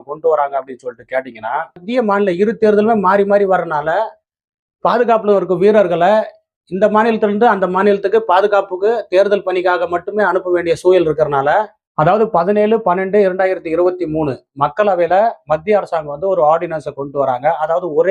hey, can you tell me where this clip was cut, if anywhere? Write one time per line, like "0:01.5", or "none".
0:01.8
0:11.8

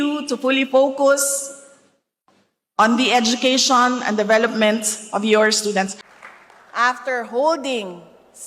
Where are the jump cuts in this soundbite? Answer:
0:06.0

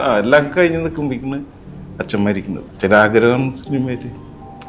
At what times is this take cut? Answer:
0:02.7

